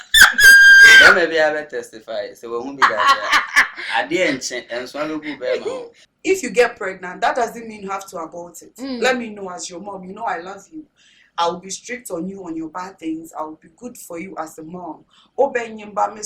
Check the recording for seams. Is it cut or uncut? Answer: cut